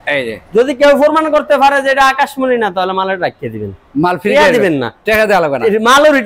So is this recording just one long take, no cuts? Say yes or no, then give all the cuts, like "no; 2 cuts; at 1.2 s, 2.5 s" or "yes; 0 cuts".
yes; 0 cuts